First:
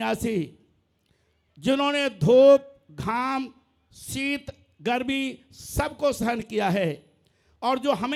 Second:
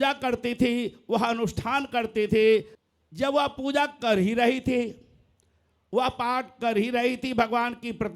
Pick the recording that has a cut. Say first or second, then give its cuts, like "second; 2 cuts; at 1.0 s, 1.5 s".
second; 1 cut; at 2.7 s